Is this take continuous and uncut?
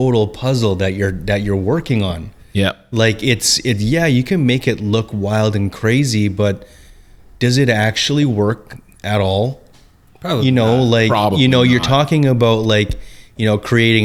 yes; 0 cuts

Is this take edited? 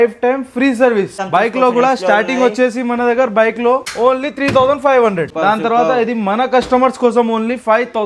yes; 3 cuts; at 1.2 s, 3.9 s, 5.3 s

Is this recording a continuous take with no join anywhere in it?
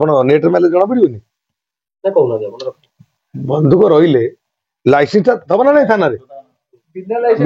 yes; 0 cuts

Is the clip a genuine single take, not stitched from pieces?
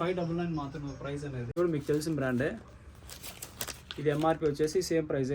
no; 1 cut; at 1.6 s

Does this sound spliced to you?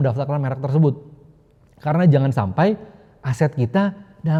no; 0 cuts

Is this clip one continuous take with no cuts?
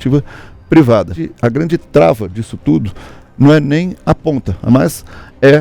no; 2 cuts; at 1.2 s, 4.5 s

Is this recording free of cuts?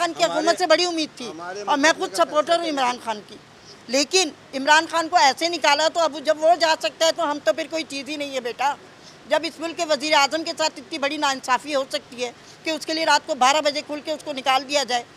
yes; 0 cuts

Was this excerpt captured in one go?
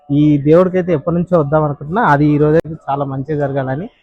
no; 1 cut; at 2.7 s

